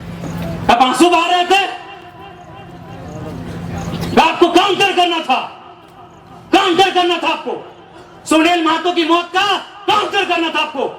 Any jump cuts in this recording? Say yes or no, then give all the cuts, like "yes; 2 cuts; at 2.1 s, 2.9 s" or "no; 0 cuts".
no; 0 cuts